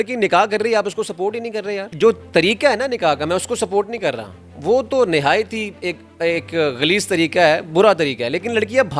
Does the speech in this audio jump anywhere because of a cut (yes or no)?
no